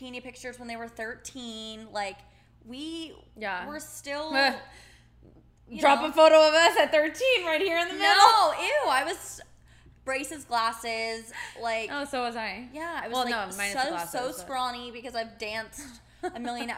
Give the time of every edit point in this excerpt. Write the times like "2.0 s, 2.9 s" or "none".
none